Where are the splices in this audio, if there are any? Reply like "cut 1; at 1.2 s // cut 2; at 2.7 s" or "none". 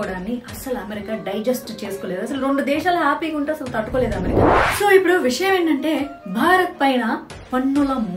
cut 1; at 4.3 s